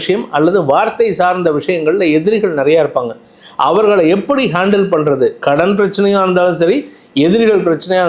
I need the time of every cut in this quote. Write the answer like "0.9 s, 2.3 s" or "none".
none